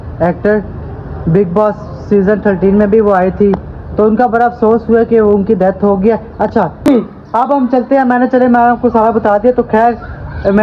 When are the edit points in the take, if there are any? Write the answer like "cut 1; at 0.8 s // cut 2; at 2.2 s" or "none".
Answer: cut 1; at 6.7 s